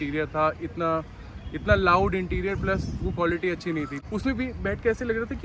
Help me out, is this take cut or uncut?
uncut